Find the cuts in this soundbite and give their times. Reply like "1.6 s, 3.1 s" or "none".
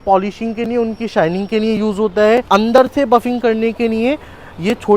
2.4 s